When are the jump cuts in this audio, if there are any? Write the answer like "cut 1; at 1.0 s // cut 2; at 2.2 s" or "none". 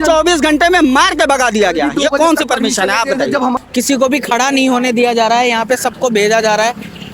cut 1; at 3.6 s